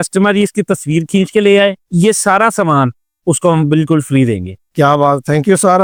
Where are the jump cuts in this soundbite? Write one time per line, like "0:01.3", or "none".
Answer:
none